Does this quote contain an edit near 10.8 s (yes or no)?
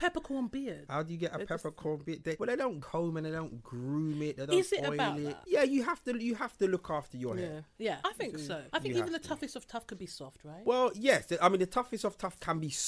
no